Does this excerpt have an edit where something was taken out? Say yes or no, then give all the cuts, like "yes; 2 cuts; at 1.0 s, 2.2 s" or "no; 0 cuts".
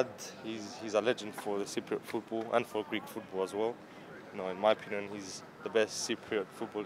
no; 0 cuts